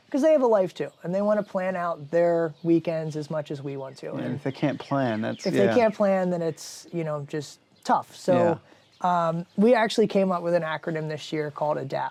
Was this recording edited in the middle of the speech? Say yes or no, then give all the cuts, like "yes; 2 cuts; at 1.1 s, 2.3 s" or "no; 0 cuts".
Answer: no; 0 cuts